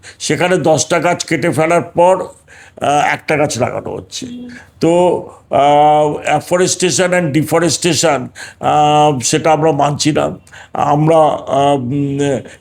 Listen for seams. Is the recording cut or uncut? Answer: uncut